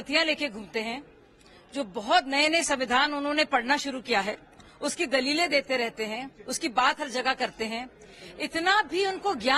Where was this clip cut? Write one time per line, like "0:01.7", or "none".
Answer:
none